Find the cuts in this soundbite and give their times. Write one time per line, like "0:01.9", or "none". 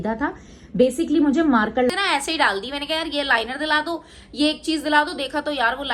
0:01.9